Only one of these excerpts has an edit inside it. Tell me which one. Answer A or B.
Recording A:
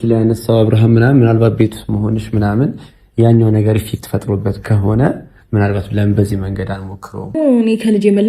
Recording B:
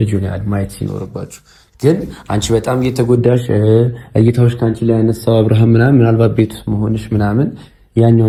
A